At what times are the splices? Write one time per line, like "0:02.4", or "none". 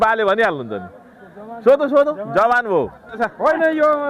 0:03.2